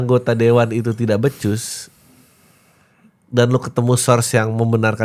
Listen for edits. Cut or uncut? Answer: uncut